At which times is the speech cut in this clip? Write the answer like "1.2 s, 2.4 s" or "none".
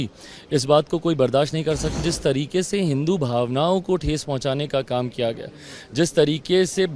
2.0 s